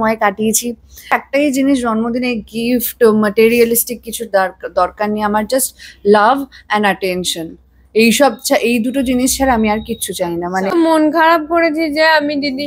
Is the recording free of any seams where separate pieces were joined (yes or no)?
no